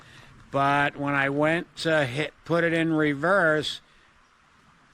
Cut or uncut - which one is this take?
uncut